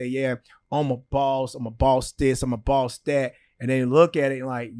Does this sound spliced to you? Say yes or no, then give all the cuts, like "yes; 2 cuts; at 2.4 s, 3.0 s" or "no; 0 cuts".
no; 0 cuts